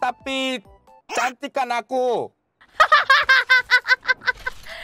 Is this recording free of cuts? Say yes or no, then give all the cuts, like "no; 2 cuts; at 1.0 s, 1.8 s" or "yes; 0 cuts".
yes; 0 cuts